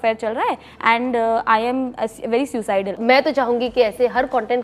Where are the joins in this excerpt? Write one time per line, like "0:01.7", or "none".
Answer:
0:03.0